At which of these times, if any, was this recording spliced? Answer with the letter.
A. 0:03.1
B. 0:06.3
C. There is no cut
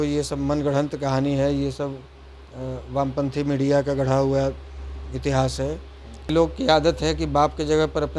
B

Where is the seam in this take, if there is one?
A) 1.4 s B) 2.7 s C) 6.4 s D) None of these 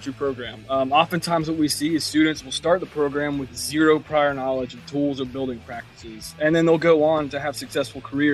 D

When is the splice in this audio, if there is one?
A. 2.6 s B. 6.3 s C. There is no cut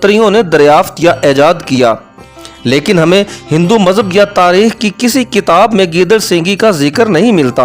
C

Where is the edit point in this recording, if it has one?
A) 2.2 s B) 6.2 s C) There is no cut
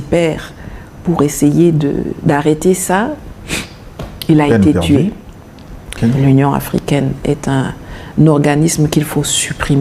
B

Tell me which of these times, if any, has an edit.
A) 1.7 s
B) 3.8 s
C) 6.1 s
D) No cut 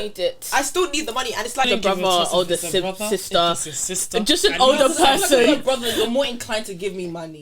A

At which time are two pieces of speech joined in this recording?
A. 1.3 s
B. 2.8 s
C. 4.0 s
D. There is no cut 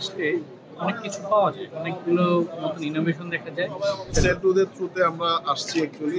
C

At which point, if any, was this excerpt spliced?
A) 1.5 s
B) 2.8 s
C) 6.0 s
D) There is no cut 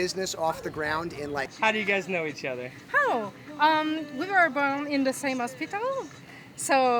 A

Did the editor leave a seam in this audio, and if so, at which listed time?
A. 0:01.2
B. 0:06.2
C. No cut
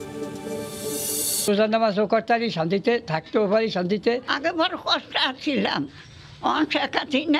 A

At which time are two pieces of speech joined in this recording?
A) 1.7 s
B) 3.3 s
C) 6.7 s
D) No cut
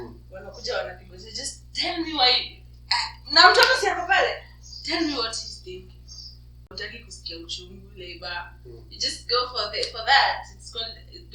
C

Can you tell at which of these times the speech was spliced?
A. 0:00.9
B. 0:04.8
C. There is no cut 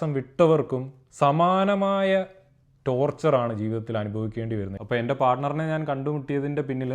B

